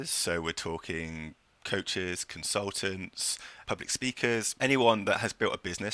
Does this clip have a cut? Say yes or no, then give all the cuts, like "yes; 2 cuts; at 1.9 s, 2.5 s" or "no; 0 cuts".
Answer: yes; 2 cuts; at 3.5 s, 4.5 s